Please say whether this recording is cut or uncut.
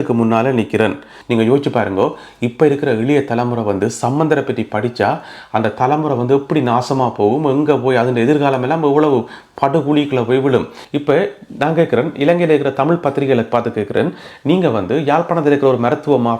cut